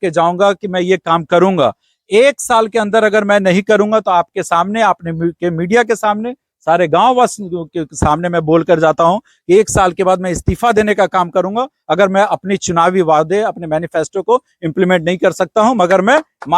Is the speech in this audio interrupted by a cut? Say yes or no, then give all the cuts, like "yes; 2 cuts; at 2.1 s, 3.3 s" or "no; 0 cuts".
no; 0 cuts